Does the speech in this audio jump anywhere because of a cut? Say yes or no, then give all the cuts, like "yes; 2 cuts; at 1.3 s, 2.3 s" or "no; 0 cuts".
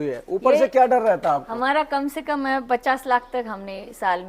yes; 1 cut; at 1.5 s